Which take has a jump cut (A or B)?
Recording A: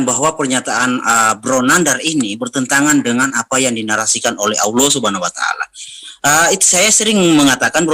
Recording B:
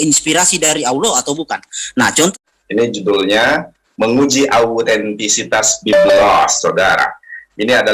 B